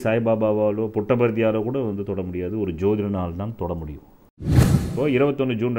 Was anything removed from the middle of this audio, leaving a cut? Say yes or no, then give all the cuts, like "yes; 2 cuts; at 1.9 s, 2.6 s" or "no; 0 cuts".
yes; 1 cut; at 4.7 s